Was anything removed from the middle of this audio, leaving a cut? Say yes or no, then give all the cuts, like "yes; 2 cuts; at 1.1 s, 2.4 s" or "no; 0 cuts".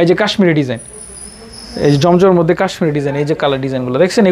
no; 0 cuts